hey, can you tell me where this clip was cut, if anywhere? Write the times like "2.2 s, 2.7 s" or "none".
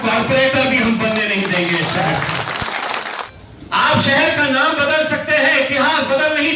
3.3 s